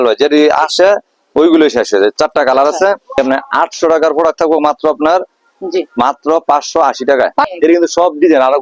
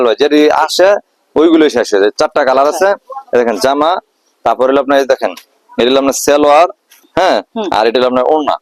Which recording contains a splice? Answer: first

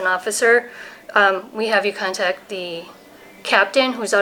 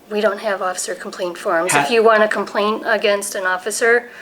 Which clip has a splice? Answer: second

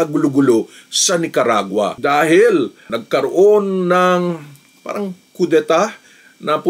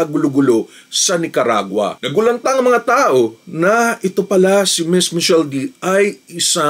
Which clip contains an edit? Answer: second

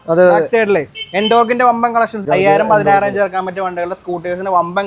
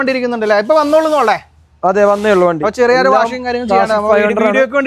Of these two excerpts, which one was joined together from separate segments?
first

